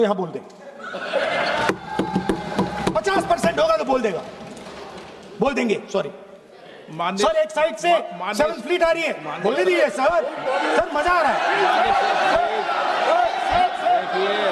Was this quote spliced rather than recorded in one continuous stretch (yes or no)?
no